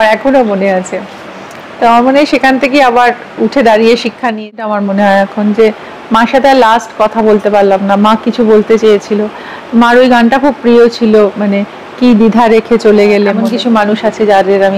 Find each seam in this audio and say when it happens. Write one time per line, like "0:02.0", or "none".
0:04.7
0:13.4